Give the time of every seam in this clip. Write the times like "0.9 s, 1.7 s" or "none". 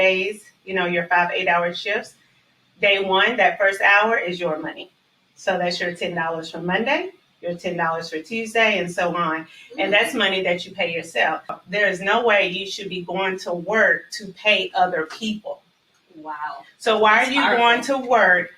11.6 s